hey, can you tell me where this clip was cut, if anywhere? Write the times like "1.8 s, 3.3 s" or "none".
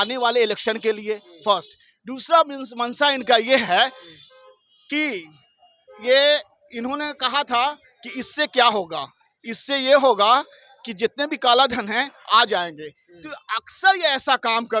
none